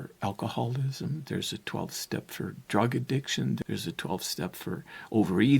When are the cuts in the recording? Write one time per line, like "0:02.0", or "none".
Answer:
0:03.6